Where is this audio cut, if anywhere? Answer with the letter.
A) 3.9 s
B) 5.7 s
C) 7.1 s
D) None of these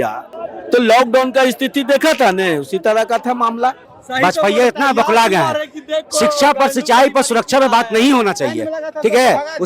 A